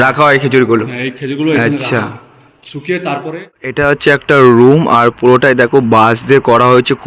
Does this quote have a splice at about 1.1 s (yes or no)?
no